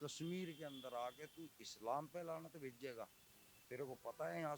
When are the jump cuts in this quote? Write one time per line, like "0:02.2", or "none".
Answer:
none